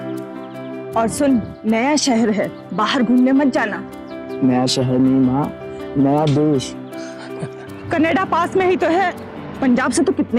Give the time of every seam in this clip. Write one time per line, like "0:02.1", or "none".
0:00.9